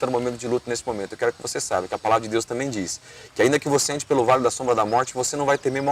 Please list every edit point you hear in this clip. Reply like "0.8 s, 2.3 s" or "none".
none